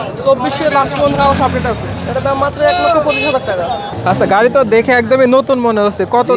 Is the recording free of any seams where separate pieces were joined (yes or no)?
no